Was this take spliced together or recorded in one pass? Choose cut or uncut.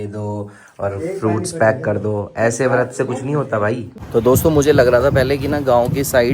cut